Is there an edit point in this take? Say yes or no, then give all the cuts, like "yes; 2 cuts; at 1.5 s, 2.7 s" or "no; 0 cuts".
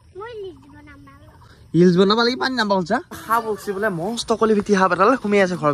yes; 1 cut; at 3.2 s